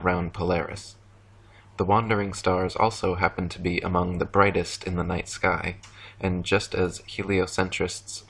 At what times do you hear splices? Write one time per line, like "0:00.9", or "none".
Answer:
0:02.3